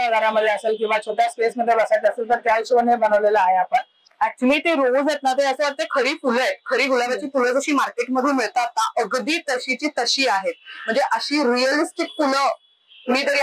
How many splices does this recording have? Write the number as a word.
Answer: one